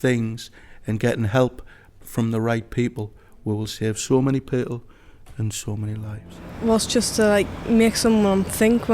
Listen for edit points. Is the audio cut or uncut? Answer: cut